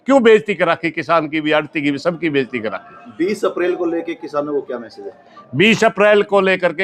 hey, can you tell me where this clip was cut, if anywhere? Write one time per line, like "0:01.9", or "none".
none